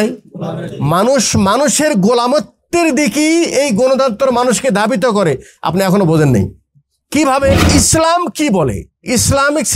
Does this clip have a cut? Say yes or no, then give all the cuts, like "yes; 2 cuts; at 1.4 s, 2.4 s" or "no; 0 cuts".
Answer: yes; 1 cut; at 7.6 s